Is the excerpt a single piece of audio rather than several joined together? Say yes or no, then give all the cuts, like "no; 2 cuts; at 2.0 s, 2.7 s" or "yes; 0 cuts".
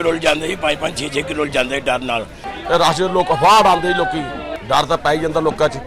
no; 2 cuts; at 2.5 s, 4.5 s